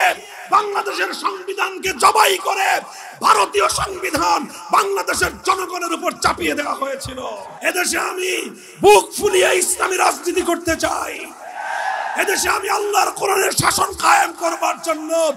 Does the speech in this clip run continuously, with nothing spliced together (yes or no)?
no